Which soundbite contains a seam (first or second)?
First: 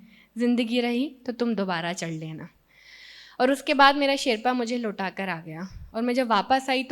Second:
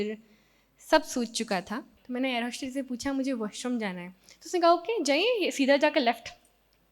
second